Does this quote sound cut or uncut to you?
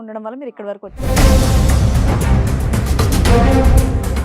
cut